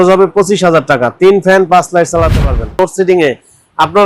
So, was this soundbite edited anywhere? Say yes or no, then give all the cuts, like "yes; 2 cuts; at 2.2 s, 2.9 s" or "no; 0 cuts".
yes; 1 cut; at 2.8 s